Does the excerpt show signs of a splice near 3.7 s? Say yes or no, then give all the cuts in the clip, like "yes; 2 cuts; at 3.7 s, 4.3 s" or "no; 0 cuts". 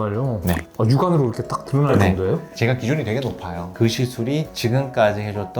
yes; 2 cuts; at 2.5 s, 3.7 s